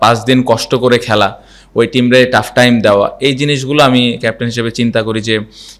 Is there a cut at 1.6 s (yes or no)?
no